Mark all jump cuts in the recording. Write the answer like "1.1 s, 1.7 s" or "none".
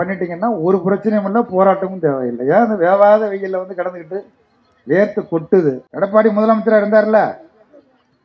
5.9 s